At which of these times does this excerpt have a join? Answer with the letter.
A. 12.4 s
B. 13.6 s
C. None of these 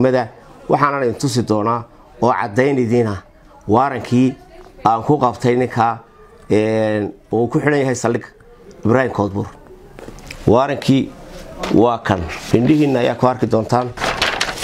A